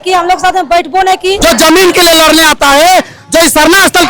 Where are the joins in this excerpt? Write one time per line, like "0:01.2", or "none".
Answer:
0:01.4